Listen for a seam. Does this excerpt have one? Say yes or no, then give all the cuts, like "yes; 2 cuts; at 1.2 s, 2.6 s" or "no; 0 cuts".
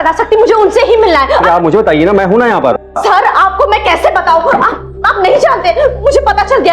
yes; 1 cut; at 2.7 s